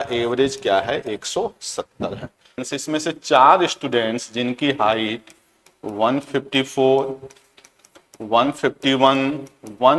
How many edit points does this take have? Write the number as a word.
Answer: one